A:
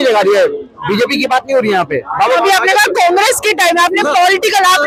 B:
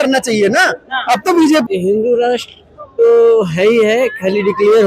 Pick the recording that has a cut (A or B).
B